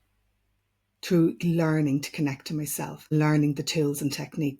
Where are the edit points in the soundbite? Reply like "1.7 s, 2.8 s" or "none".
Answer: 3.1 s